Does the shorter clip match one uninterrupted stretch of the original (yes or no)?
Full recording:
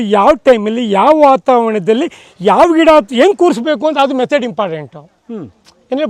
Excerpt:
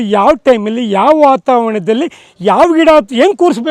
yes